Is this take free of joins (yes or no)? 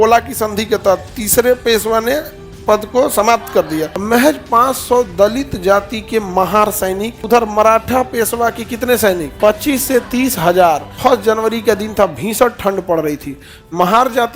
no